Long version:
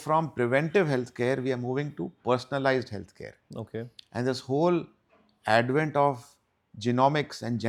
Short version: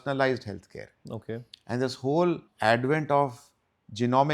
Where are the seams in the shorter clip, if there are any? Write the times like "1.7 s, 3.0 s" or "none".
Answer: 2.5 s